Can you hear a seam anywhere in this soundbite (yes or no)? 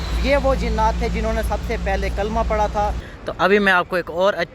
yes